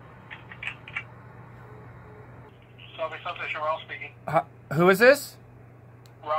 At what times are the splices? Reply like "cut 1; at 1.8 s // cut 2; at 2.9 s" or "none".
cut 1; at 2.5 s